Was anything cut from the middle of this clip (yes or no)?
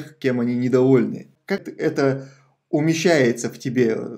yes